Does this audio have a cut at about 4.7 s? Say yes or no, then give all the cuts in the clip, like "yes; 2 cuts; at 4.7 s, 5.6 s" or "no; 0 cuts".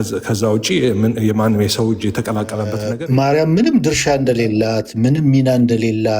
no; 1 cut; at 2.8 s